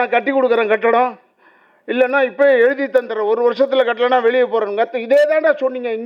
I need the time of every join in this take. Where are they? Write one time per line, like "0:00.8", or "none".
none